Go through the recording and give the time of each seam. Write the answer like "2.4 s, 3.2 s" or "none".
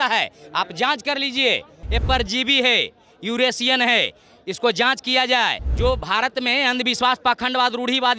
1.8 s, 5.6 s